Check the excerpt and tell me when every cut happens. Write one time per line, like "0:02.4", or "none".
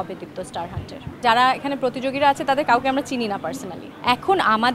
0:01.2
0:03.7